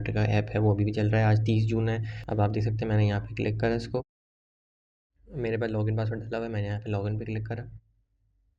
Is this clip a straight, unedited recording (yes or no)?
no